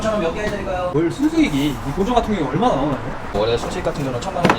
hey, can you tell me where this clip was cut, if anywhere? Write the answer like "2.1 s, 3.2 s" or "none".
none